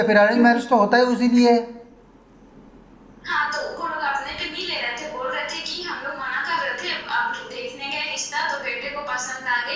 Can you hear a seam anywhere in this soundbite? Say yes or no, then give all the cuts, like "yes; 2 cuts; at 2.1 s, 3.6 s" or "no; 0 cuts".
no; 0 cuts